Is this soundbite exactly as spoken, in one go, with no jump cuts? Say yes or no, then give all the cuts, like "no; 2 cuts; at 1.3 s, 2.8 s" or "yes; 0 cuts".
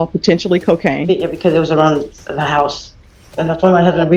yes; 0 cuts